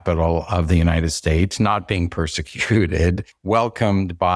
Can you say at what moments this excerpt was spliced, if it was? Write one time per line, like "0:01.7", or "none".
0:03.3